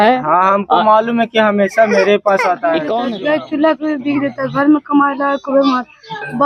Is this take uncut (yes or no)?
no